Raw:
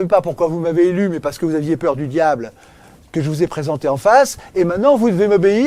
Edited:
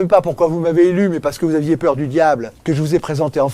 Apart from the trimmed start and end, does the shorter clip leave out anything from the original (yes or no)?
yes